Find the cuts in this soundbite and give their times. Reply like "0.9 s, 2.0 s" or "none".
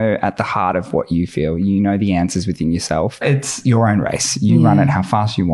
3.2 s